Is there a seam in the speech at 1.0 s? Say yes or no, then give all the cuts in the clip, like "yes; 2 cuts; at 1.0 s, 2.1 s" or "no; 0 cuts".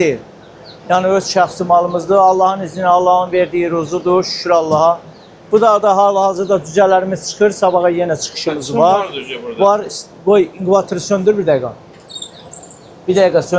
no; 0 cuts